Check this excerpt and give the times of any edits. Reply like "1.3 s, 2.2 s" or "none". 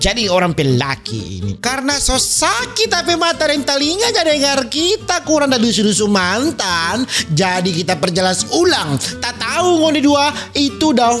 1.6 s